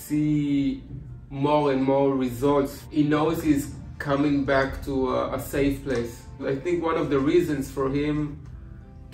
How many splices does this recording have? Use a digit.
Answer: 2